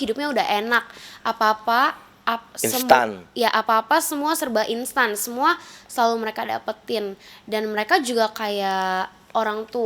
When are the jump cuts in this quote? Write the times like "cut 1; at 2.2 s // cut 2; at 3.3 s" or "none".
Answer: none